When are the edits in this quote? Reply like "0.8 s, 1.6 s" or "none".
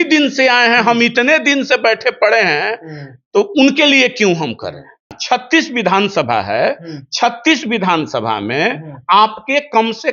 5.2 s